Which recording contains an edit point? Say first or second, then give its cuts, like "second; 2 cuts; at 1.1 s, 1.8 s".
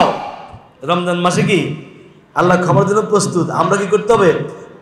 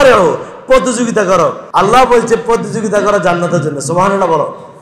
second; 1 cut; at 1.6 s